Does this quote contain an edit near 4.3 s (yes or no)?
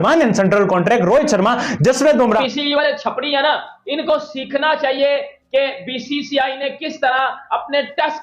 no